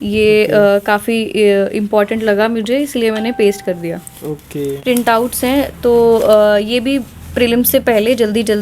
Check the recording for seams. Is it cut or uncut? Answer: cut